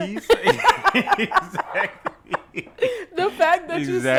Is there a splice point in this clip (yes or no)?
no